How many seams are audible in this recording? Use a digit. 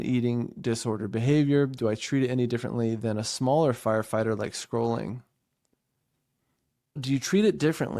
1